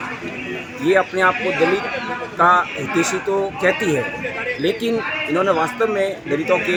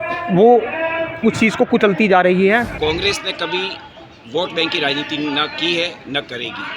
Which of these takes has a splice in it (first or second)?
second